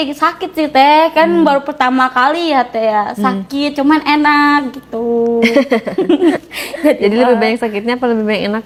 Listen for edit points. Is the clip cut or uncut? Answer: uncut